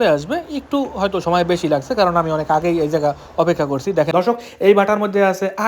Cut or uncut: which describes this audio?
cut